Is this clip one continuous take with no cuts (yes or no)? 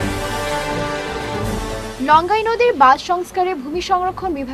no